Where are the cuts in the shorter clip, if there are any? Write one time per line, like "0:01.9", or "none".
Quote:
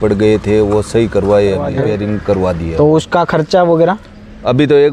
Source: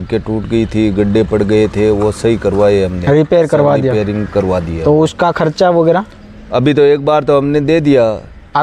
0:01.7